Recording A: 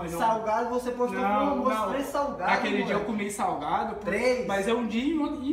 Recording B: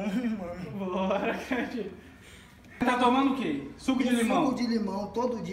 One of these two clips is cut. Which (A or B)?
B